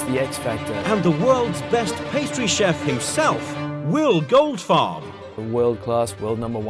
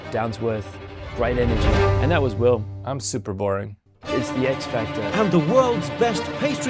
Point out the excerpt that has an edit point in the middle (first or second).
second